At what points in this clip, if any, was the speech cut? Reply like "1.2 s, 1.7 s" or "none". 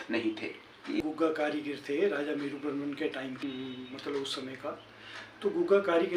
1.0 s, 3.3 s